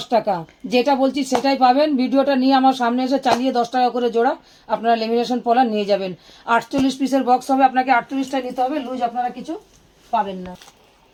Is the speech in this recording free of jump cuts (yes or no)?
yes